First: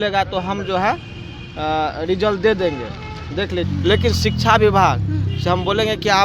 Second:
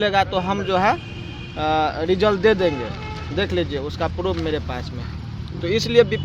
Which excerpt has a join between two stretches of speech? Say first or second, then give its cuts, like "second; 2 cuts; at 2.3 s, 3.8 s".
first; 1 cut; at 3.7 s